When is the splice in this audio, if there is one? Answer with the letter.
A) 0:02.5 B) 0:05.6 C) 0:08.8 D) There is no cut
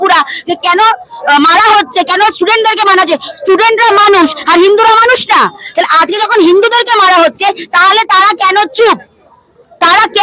D